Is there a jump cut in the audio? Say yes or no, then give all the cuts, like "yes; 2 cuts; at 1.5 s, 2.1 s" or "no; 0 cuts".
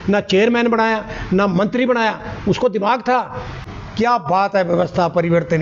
yes; 1 cut; at 3.5 s